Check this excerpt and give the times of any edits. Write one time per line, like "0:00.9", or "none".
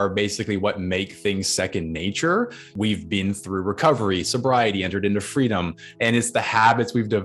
0:02.7
0:05.8

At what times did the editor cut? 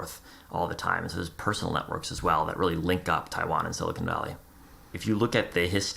0:04.9

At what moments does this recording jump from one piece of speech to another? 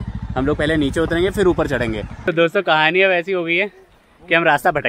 0:02.1

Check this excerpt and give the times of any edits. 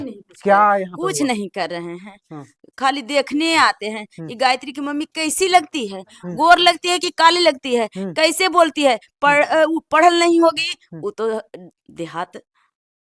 none

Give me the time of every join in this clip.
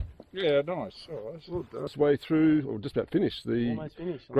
0:01.9

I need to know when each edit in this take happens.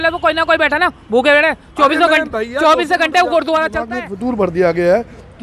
0:04.0

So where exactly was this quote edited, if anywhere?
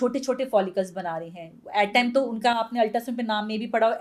none

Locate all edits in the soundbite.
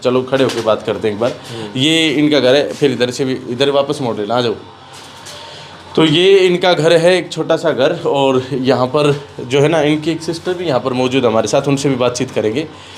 none

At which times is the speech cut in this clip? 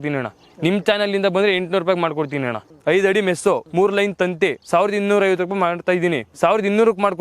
0:02.7
0:03.7
0:04.6
0:06.3

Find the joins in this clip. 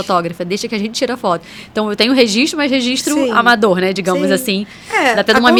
none

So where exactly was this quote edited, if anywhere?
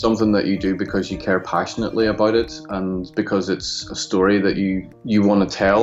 0:04.9

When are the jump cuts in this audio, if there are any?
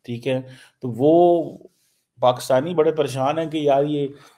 none

